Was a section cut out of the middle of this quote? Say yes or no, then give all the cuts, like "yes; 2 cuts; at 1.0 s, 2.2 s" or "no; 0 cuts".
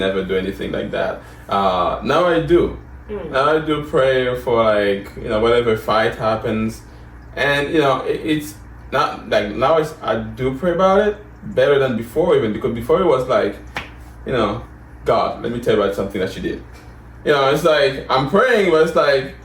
no; 0 cuts